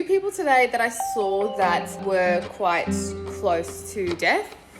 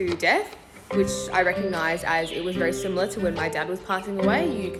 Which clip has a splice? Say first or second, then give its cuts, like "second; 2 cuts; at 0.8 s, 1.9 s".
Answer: first; 1 cut; at 1.9 s